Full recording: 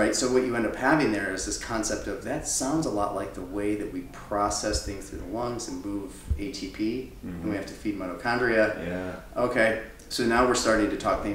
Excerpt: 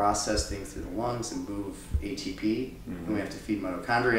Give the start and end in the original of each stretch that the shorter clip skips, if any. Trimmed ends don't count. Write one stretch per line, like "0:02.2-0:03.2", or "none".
none

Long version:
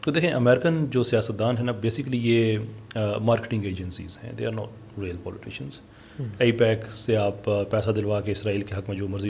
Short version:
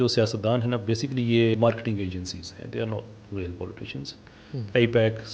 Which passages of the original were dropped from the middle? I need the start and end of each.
0:02.5-0:03.2

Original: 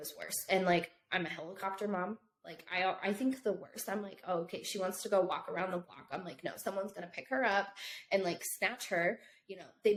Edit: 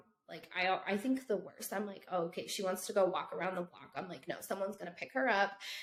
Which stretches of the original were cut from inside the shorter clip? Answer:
none

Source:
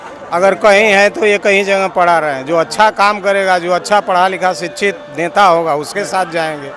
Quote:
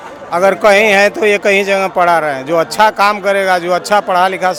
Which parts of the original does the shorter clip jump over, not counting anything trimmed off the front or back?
none

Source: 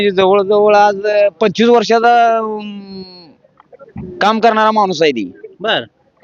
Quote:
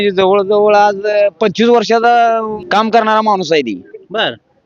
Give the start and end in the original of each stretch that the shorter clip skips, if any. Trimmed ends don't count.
0:02.6-0:04.1

